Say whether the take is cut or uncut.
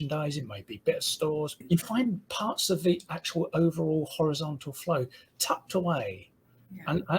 cut